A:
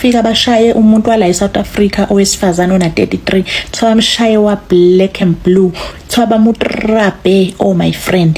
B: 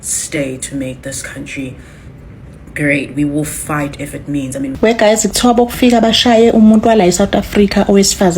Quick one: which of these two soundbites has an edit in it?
B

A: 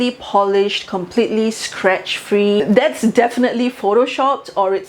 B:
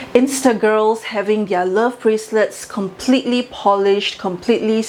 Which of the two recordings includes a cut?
A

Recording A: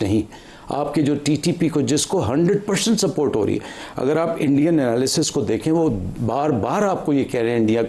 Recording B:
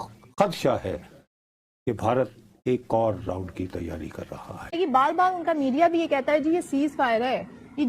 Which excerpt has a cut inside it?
B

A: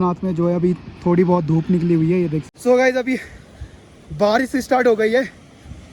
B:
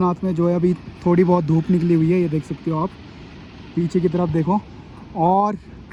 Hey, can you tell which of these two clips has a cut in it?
A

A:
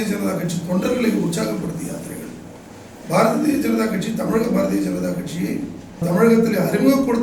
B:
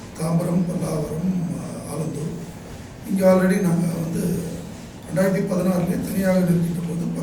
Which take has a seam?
A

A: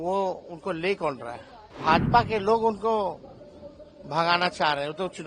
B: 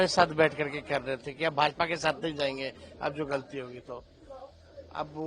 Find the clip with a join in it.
A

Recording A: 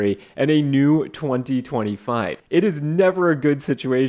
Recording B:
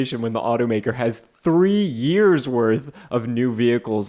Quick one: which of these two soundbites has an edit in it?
A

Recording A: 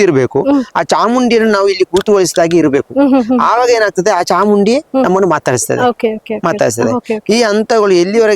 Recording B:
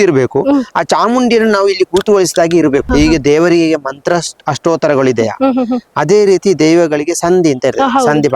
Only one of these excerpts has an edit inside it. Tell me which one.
B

